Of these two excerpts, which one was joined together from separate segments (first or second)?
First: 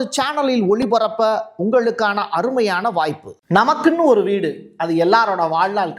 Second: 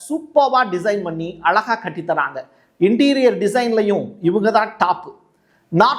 first